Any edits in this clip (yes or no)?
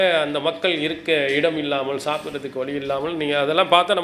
no